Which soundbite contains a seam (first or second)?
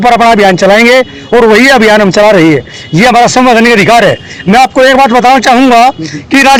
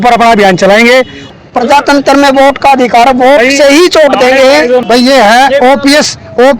second